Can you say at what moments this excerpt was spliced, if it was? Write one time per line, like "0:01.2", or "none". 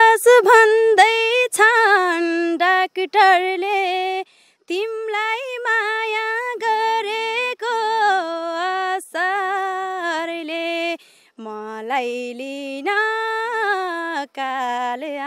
none